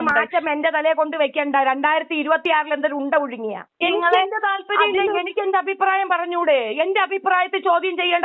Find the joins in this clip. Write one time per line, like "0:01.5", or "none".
0:03.8

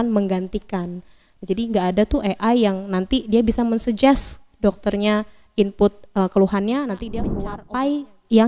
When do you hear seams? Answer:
0:07.4

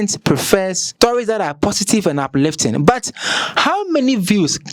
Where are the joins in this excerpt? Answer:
none

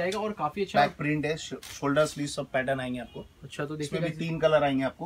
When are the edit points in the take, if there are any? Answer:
none

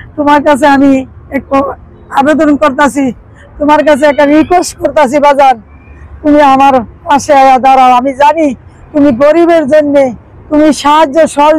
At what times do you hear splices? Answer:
none

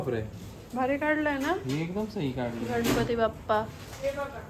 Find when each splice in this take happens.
none

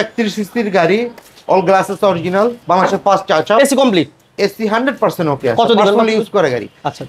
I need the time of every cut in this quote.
none

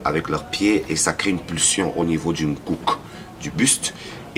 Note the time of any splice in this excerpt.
none

